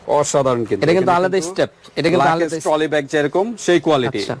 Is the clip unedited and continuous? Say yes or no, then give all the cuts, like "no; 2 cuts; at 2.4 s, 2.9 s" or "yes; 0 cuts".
yes; 0 cuts